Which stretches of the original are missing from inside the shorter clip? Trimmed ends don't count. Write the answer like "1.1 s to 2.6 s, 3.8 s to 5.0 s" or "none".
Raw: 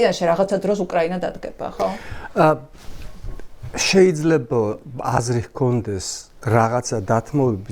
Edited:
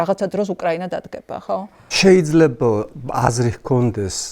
2.1 s to 3.7 s